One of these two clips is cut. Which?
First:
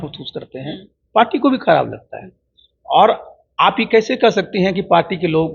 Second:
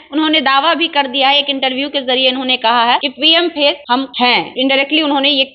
second; 2 cuts; at 3.1 s, 4.2 s

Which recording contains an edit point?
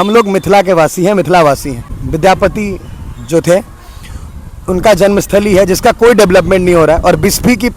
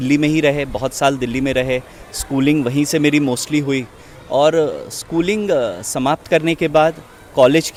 first; 1 cut; at 1.8 s

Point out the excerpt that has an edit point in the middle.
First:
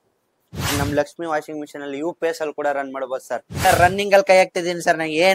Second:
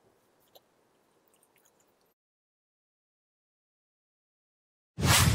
first; 2 cuts; at 0.7 s, 3.5 s

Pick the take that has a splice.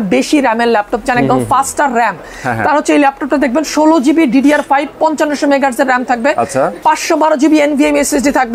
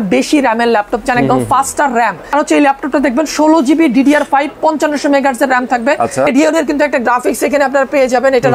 second; 2 cuts; at 2.3 s, 6.3 s

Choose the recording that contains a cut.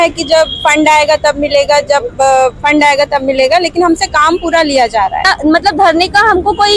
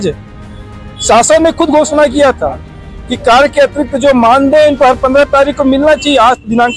first; 1 cut; at 5.3 s

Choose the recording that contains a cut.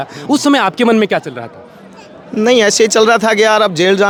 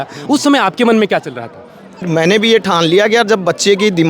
second; 1 cut; at 2.0 s

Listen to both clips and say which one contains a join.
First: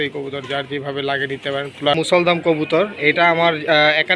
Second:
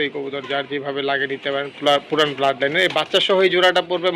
first; 1 cut; at 1.9 s

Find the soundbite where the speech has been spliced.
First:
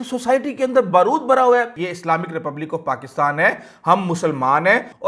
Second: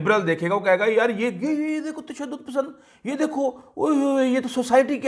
first; 1 cut; at 1.8 s

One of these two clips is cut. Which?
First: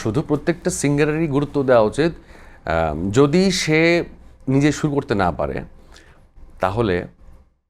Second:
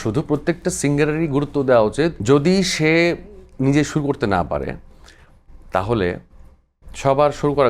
second; 1 cut; at 2.2 s

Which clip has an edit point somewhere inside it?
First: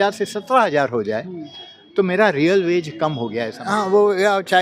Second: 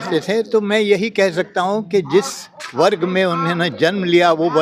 first; 1 cut; at 3.6 s

